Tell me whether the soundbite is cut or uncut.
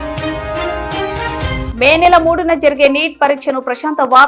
cut